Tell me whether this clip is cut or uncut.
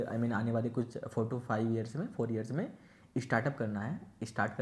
uncut